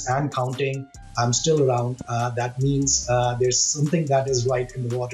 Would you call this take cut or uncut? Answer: uncut